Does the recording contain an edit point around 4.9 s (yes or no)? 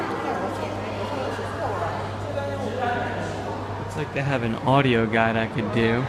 yes